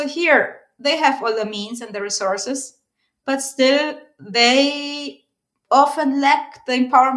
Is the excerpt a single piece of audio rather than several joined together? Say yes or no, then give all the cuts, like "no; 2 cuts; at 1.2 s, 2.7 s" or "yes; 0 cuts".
yes; 0 cuts